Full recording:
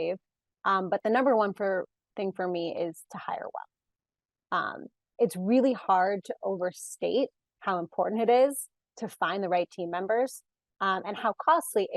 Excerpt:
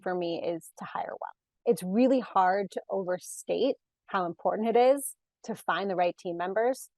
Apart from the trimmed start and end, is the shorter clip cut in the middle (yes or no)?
yes